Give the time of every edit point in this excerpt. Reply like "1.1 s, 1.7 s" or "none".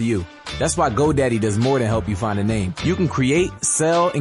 0.9 s, 2.7 s